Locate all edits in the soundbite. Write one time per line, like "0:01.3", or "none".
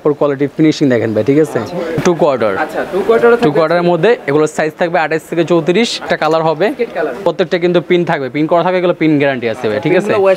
0:02.0
0:06.0
0:07.2